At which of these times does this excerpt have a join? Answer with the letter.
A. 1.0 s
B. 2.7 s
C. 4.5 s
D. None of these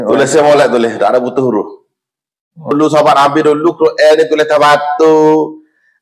B